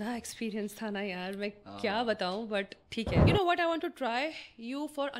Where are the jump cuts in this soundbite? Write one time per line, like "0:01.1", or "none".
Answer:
0:03.2